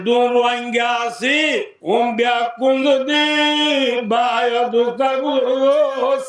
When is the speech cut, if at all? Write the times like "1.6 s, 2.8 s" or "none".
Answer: 1.7 s